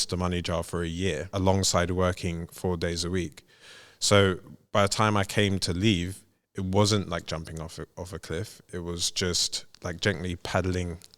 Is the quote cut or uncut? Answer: cut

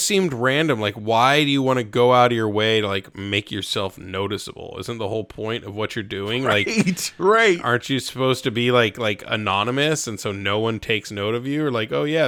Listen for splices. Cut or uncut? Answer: uncut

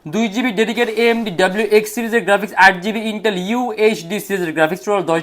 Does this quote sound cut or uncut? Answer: uncut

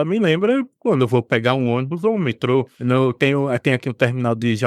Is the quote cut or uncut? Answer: cut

